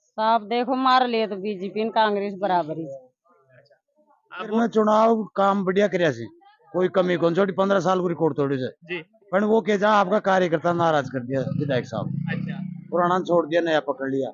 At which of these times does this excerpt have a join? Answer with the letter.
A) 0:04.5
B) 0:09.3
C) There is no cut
A